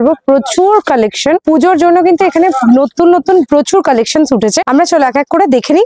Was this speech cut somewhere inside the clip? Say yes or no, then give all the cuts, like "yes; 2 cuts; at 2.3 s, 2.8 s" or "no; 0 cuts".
no; 0 cuts